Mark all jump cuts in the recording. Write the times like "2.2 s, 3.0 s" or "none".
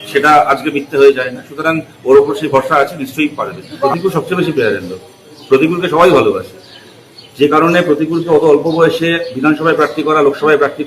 3.8 s